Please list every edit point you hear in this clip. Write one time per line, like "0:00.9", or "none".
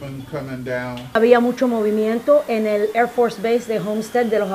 0:01.1